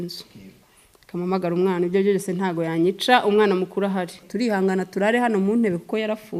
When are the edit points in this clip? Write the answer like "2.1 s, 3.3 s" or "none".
4.2 s